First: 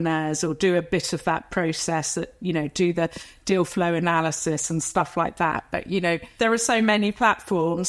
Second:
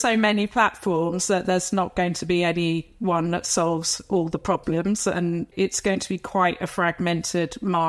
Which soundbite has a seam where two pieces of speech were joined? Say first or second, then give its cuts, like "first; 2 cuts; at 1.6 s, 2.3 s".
second; 1 cut; at 5.5 s